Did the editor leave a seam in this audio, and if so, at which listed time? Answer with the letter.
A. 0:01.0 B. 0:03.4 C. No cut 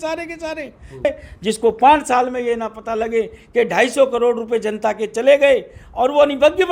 A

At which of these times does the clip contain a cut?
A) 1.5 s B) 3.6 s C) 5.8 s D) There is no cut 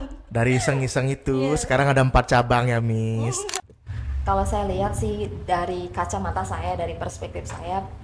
B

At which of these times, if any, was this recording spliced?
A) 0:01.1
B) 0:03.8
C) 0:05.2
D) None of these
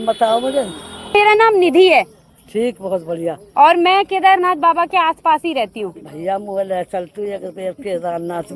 A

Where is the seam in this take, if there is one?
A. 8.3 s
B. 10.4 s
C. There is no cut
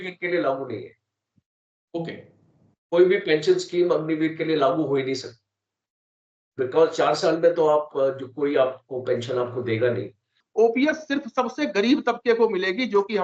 B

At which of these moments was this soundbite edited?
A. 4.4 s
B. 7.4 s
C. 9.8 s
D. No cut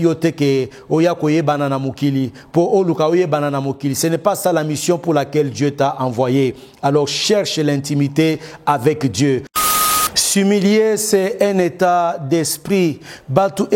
C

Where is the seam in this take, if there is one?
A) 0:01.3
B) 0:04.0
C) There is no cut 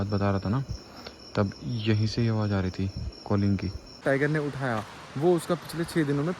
B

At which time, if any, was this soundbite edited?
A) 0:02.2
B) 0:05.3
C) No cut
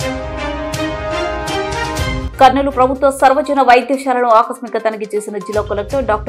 A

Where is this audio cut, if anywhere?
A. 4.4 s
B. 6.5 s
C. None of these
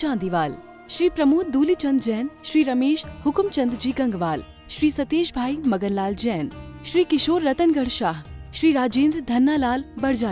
C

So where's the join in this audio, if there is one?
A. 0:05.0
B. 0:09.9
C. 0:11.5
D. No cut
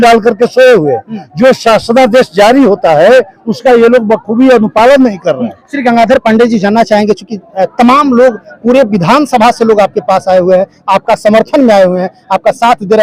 D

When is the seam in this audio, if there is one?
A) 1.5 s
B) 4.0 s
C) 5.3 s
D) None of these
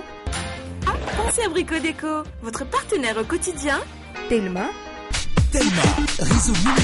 B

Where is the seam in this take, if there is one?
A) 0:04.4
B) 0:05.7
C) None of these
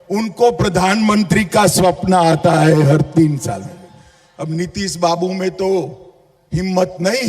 A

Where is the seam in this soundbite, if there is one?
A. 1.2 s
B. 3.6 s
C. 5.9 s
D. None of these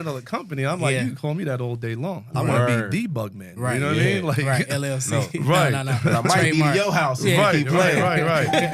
D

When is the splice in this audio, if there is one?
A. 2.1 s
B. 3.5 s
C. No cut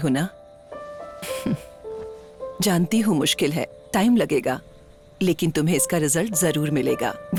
C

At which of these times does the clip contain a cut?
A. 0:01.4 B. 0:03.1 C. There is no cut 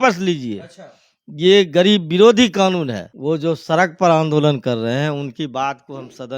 B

